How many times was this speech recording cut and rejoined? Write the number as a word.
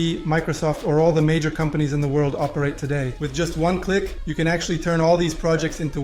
one